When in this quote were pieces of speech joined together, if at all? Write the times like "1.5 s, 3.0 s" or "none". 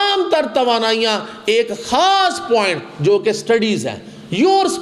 none